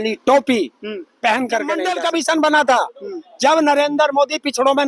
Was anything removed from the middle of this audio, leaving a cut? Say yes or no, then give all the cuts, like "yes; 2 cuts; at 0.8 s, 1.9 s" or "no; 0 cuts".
yes; 1 cut; at 1.8 s